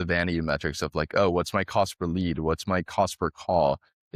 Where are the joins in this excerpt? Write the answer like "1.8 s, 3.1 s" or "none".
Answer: none